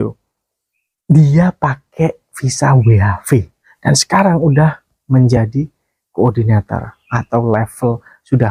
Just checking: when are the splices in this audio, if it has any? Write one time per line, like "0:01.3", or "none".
0:03.6